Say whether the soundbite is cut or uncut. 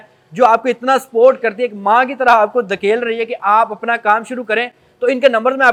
uncut